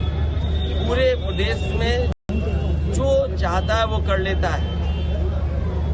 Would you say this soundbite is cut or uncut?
uncut